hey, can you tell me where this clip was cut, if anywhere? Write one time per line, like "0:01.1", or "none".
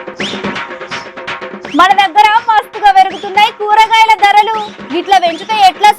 0:01.3